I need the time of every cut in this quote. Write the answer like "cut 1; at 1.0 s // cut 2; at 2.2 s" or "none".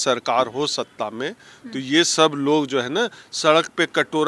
none